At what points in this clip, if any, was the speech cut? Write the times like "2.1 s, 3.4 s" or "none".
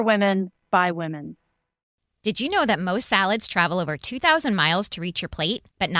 1.9 s